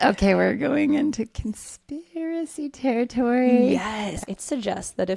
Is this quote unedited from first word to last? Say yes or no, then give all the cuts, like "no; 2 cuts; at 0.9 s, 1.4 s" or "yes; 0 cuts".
no; 1 cut; at 4.1 s